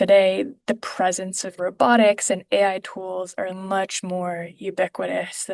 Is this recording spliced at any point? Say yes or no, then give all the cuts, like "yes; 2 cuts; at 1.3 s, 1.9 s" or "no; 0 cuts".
no; 0 cuts